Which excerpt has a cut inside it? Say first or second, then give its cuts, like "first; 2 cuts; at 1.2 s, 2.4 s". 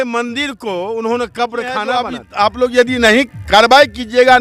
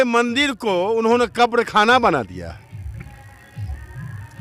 first; 1 cut; at 2.2 s